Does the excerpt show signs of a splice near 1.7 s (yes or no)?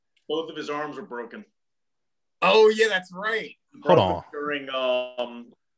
no